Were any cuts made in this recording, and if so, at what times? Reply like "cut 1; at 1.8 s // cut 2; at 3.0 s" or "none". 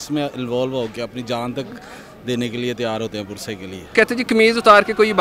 cut 1; at 3.9 s